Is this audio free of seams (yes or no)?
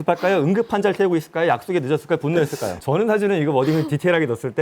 no